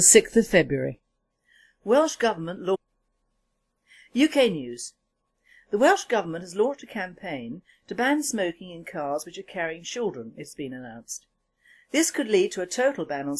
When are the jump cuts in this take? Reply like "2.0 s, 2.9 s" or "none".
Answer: none